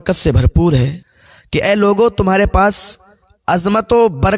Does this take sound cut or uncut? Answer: cut